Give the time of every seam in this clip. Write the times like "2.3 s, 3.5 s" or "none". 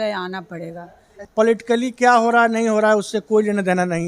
1.2 s